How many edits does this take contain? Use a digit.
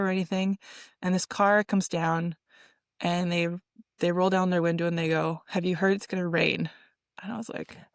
0